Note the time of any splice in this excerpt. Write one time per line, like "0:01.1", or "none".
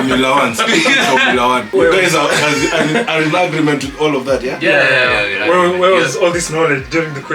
0:01.7

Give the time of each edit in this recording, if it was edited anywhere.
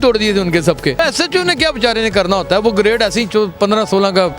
0:01.0

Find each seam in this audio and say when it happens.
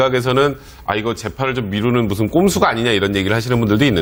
none

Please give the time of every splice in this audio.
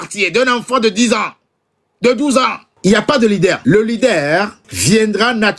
0:02.7
0:03.6
0:04.7

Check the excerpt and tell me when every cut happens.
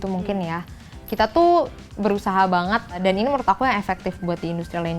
0:03.0

